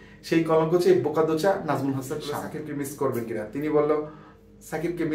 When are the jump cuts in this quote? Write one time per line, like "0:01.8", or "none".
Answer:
0:02.5